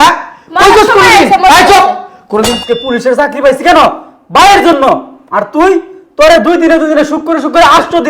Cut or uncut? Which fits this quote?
cut